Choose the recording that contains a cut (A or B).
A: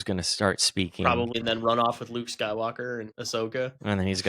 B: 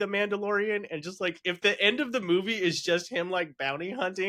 A